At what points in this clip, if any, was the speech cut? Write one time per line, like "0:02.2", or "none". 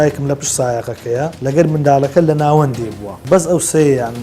0:01.4
0:03.1